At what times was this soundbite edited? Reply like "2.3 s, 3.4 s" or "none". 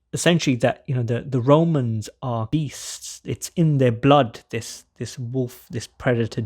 2.5 s

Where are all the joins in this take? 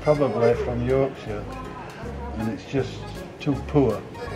none

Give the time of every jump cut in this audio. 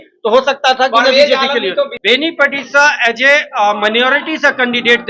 2.0 s

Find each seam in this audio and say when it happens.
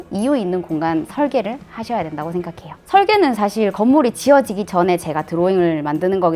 2.8 s

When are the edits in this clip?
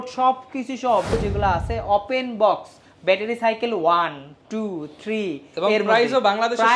0.9 s

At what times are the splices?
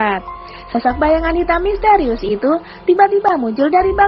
none

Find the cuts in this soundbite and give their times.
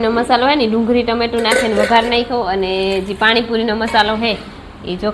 none

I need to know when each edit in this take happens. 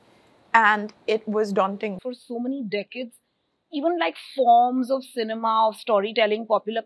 1.9 s

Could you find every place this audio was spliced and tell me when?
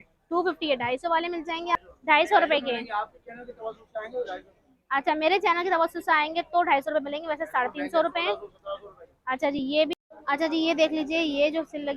1.8 s, 9.9 s

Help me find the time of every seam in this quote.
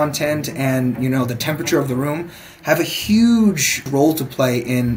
3.9 s

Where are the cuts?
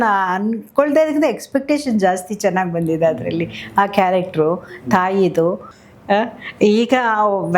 5.7 s

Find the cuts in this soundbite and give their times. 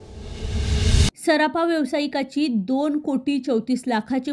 0.9 s

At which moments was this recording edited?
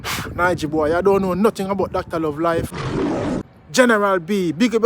3.3 s

